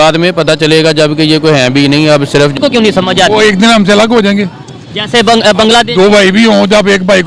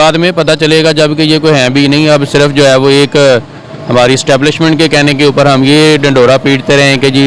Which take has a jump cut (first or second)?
first